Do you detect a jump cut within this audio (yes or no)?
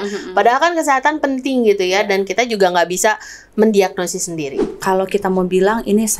yes